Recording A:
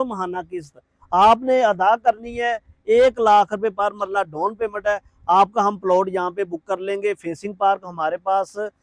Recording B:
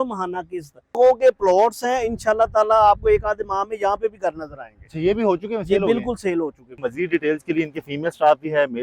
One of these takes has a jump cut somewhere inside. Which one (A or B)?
B